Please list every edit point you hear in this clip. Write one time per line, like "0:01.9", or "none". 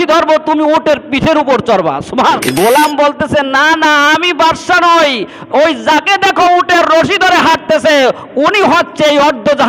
0:02.4